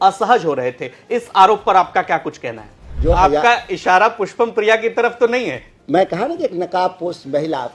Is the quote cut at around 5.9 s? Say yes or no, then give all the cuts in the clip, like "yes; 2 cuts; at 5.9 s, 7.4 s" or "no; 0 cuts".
no; 1 cut; at 2.9 s